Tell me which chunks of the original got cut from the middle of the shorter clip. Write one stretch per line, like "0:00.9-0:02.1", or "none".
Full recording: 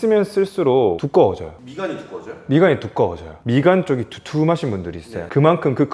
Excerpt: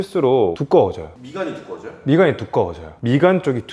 none